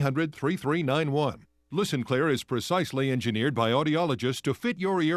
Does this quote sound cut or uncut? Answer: cut